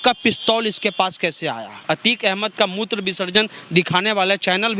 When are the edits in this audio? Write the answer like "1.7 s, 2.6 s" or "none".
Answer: 1.7 s